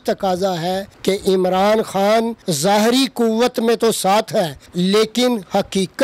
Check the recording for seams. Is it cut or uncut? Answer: cut